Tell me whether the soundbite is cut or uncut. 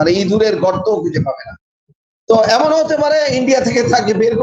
uncut